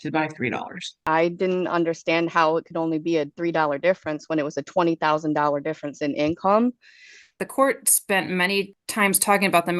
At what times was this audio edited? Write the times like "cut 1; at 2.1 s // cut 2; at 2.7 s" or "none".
cut 1; at 1.0 s // cut 2; at 7.4 s // cut 3; at 8.8 s